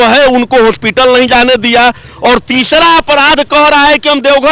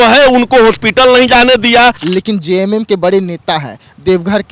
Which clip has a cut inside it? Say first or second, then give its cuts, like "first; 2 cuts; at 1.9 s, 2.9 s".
second; 1 cut; at 2.0 s